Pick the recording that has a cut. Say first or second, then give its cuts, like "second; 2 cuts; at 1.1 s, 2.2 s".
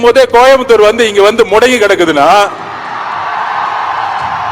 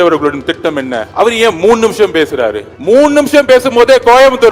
second; 2 cuts; at 1.0 s, 2.7 s